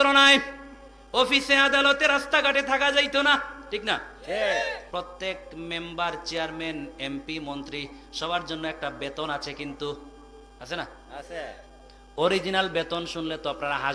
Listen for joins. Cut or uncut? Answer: cut